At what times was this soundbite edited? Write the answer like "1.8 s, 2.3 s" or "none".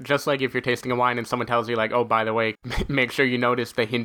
2.6 s